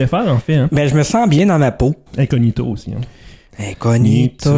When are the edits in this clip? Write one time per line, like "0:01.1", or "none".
0:02.0